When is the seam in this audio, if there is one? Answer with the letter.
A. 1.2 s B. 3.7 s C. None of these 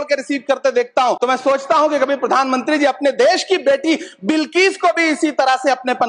A